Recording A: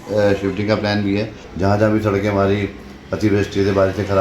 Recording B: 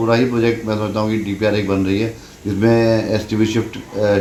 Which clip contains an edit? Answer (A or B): A